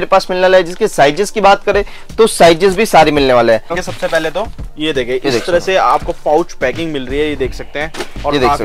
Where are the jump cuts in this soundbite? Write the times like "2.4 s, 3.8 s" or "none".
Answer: 3.8 s